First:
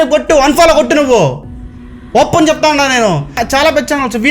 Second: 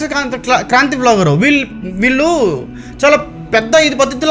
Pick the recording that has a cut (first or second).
first